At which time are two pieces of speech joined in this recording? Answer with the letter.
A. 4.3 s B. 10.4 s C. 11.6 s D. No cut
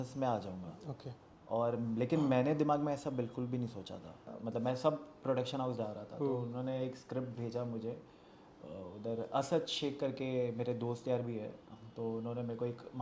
A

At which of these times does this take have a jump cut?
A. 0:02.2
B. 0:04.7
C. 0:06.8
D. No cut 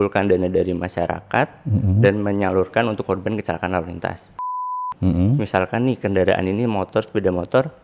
B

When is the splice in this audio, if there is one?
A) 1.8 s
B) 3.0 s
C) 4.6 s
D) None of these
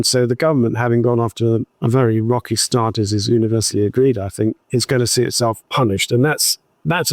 C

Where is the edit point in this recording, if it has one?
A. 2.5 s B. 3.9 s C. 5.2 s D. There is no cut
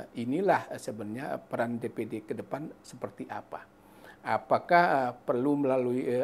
D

